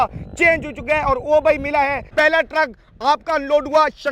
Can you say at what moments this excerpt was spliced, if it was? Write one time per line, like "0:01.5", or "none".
0:02.0

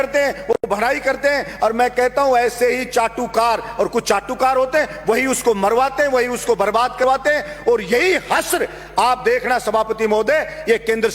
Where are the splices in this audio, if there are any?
none

